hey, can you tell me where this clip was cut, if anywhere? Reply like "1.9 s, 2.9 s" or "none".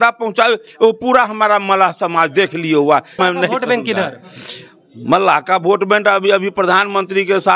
3.1 s